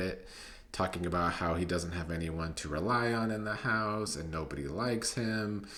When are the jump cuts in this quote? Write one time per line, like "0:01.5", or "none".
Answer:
none